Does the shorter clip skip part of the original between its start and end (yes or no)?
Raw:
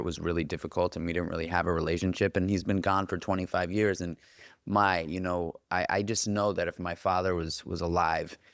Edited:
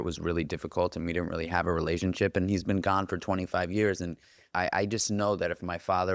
yes